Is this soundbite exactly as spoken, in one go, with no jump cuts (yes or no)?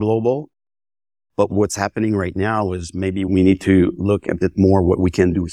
no